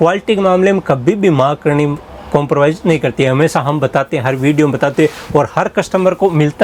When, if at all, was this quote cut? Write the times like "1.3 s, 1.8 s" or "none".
none